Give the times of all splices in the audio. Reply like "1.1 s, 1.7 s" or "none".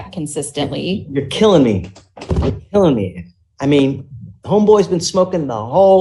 none